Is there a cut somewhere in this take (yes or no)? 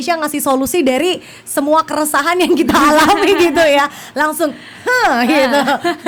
no